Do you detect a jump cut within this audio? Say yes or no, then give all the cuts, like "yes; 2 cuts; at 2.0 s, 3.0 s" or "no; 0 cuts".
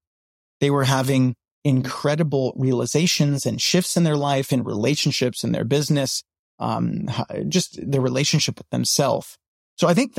no; 0 cuts